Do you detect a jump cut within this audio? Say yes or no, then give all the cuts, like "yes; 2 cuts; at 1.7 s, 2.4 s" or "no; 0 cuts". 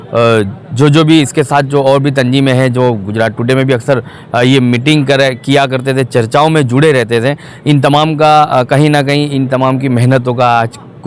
no; 0 cuts